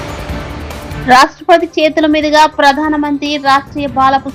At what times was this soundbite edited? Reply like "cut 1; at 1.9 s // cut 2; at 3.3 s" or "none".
none